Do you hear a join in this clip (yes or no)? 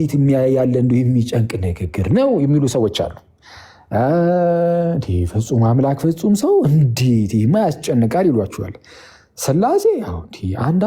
no